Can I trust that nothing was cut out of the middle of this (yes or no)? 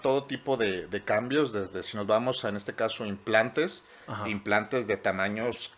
yes